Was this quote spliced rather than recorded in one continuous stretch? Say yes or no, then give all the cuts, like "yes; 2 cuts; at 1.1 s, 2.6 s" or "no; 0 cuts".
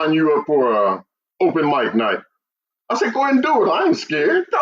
no; 0 cuts